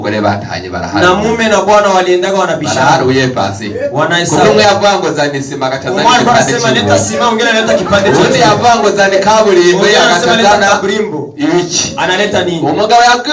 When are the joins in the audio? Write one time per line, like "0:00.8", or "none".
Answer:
none